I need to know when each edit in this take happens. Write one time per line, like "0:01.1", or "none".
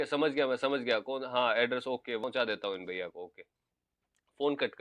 none